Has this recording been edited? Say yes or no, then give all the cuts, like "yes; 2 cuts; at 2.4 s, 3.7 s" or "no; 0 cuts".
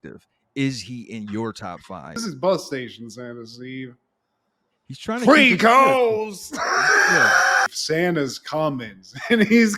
yes; 2 cuts; at 2.2 s, 7.7 s